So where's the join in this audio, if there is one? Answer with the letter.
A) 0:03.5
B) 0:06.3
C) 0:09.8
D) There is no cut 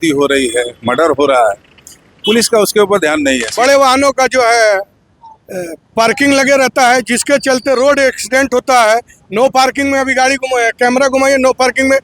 A